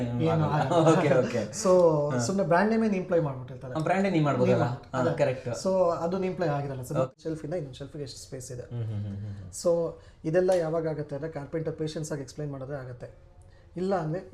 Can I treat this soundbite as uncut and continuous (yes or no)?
no